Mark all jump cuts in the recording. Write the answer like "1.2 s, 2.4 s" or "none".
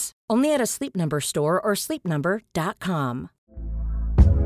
3.3 s